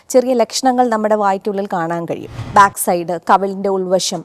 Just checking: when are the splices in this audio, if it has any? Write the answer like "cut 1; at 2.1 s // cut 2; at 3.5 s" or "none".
cut 1; at 2.4 s